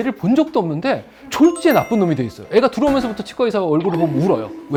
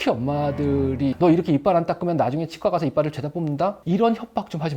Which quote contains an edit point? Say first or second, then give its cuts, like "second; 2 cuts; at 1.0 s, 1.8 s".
second; 2 cuts; at 1.1 s, 3.8 s